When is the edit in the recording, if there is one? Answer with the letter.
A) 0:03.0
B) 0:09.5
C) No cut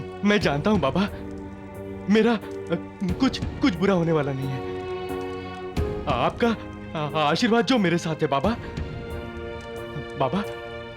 C